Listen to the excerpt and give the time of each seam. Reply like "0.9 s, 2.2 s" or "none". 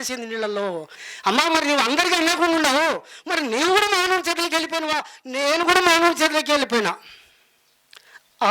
0.9 s

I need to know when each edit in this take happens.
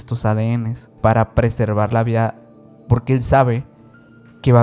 1.0 s

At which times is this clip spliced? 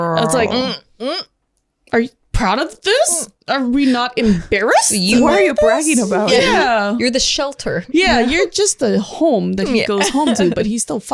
none

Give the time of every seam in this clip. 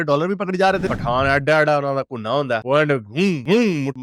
0.9 s

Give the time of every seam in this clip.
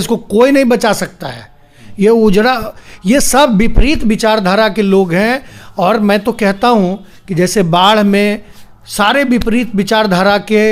none

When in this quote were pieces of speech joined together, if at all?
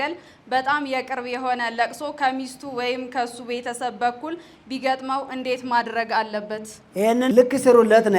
7.2 s

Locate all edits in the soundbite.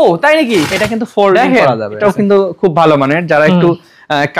2.0 s

